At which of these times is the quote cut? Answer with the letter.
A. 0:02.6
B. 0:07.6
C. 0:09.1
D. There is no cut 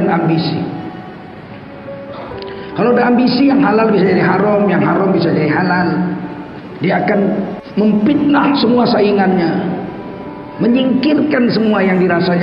B